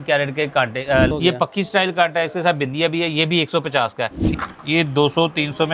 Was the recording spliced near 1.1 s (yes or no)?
yes